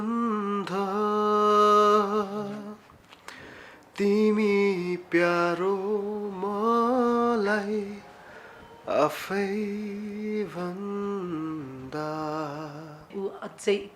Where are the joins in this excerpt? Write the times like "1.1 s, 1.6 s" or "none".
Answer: 13.0 s